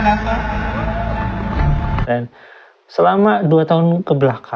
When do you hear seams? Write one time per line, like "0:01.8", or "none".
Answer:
0:02.0

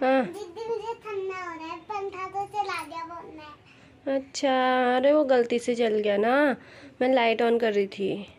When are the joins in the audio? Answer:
none

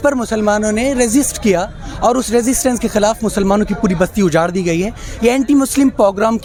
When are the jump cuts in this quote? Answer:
none

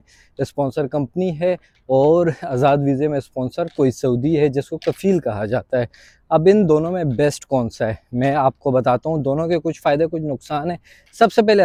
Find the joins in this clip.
none

